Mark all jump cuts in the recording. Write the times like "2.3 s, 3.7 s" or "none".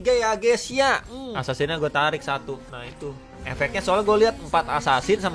1.4 s